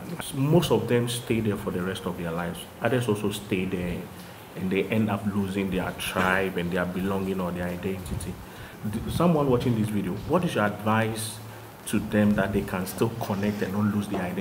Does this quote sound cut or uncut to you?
uncut